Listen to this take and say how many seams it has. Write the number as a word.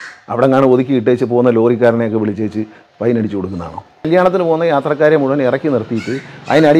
one